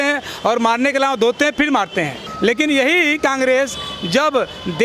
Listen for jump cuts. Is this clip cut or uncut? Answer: cut